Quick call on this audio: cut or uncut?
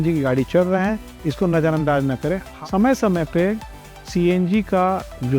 cut